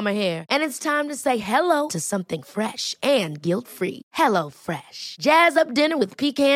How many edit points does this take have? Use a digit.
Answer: 0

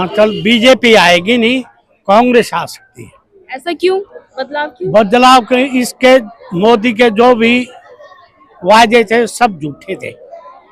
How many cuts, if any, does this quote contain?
1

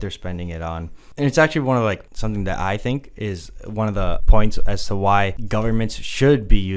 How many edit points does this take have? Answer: 4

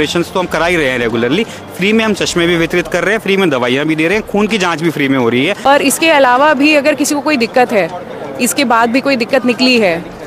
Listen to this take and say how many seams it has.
1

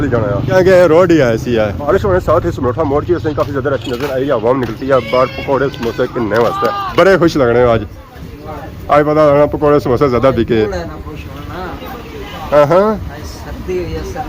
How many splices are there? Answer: 2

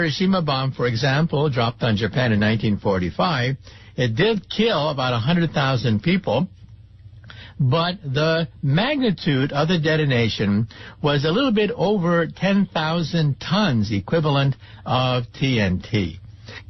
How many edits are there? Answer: 1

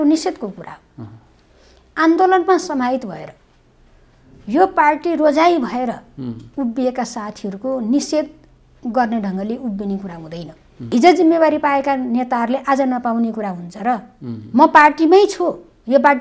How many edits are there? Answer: 1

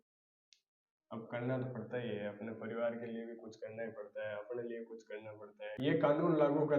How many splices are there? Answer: 1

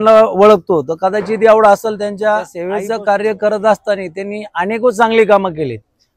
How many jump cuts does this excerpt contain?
1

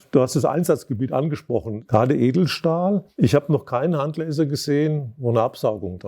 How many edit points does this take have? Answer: 2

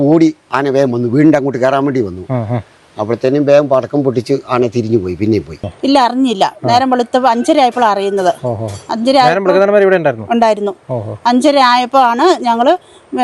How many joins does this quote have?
1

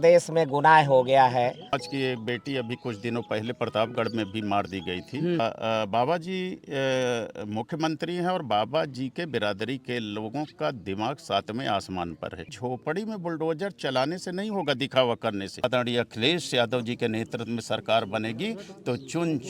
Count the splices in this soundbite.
4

